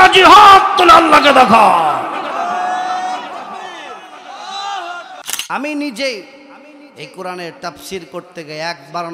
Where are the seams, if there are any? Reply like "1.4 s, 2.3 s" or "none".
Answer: 5.2 s